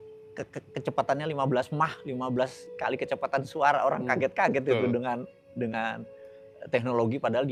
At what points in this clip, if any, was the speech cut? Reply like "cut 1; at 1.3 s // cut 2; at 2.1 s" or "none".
none